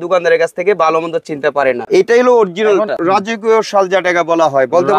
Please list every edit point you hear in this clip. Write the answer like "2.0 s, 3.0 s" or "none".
1.8 s, 3.0 s